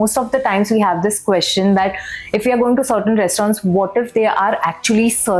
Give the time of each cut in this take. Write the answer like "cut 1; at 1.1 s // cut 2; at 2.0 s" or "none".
none